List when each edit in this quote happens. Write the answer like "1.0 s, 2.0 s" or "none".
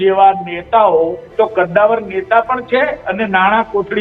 1.2 s